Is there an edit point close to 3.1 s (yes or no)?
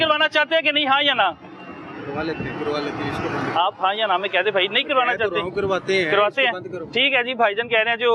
no